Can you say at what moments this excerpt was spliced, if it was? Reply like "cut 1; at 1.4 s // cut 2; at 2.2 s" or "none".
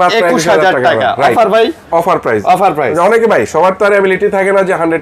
none